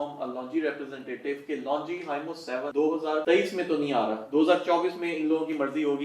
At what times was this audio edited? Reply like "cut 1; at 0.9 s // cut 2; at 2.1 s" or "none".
cut 1; at 2.9 s